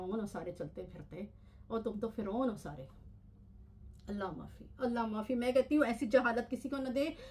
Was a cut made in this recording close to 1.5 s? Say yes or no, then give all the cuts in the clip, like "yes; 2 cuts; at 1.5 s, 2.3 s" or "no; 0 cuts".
no; 0 cuts